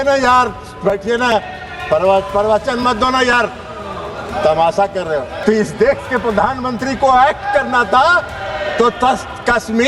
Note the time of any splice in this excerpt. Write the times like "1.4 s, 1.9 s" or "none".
5.3 s